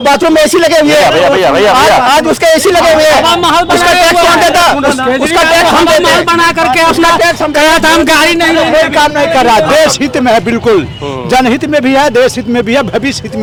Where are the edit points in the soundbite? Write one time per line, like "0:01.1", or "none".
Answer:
none